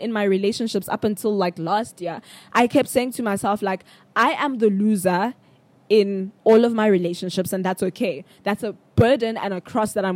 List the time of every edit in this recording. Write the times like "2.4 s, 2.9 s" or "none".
none